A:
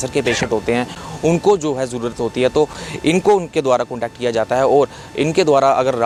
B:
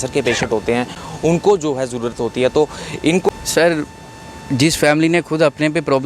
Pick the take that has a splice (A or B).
B